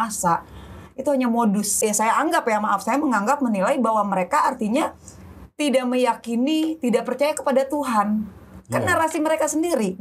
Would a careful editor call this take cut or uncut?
cut